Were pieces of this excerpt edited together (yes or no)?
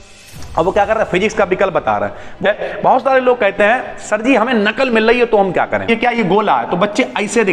yes